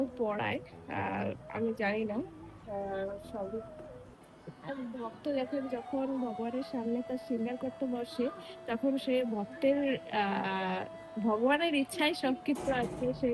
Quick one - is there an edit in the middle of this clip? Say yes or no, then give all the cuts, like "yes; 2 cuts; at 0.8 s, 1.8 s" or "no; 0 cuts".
no; 0 cuts